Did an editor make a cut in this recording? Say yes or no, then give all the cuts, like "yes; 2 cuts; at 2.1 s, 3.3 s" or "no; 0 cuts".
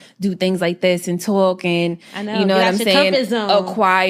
no; 0 cuts